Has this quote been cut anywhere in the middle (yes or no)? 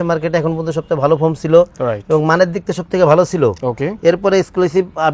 no